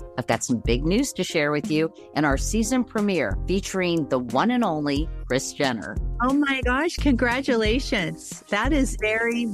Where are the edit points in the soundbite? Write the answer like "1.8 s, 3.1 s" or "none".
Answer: none